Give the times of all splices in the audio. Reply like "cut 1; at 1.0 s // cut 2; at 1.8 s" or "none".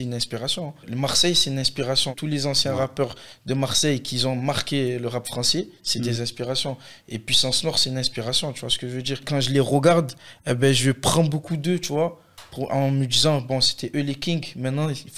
cut 1; at 0.9 s // cut 2; at 2.1 s // cut 3; at 9.2 s